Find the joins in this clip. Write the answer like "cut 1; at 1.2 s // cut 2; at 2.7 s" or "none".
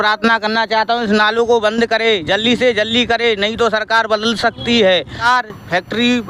cut 1; at 5.2 s